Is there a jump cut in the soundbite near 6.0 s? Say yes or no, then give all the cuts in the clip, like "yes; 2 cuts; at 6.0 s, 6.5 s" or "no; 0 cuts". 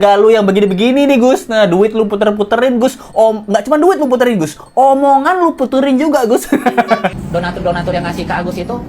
no; 1 cut; at 7.2 s